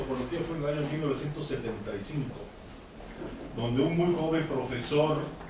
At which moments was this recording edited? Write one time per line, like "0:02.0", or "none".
0:02.7